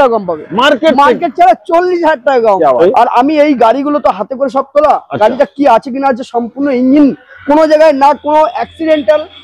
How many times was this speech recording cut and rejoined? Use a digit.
1